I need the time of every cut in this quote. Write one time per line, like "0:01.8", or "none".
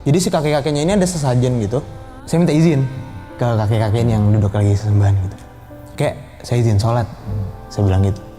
0:01.9